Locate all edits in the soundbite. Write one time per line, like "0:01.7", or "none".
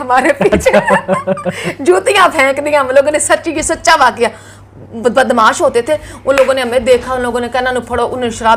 none

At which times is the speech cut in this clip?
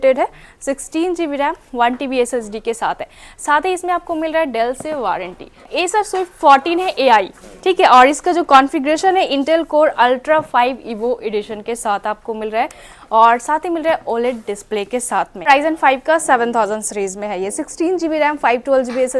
0:05.7
0:15.5

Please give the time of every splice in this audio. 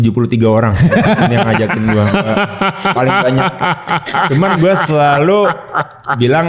none

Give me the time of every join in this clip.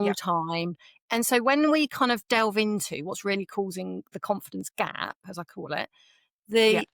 0:00.9

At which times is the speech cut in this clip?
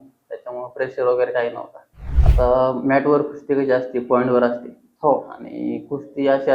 0:02.1

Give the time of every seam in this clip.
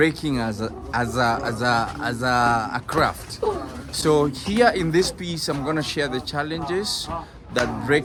none

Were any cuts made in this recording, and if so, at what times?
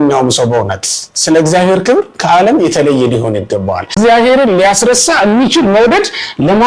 0:03.9

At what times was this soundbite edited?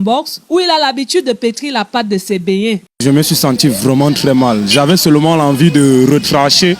0:02.8

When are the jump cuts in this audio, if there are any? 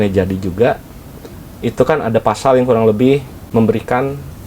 0:03.4

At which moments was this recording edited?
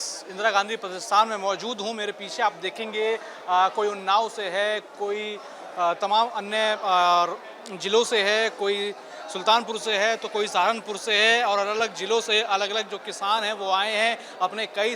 none

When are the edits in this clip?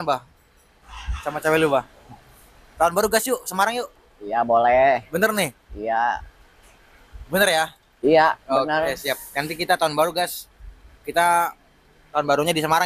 none

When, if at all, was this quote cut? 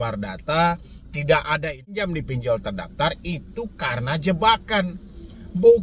0:02.1

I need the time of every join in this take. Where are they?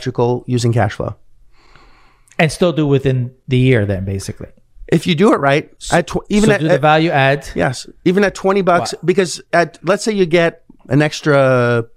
none

